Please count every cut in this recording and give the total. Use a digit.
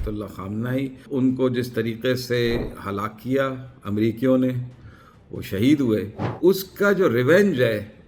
2